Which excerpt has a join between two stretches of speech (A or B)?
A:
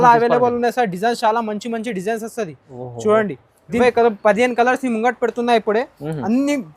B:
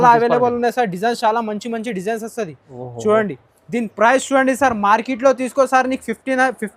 A